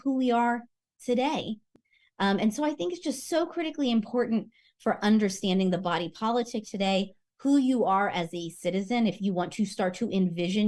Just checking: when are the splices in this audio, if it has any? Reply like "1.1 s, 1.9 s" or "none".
1.8 s